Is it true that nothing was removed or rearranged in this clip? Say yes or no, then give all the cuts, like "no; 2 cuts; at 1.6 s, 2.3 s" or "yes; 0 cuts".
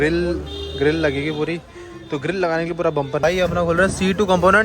no; 1 cut; at 3.2 s